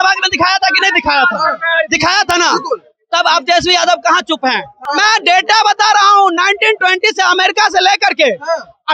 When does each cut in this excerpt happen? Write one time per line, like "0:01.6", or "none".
0:04.7